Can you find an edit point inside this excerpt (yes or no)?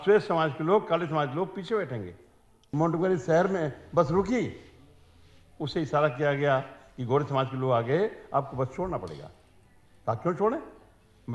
yes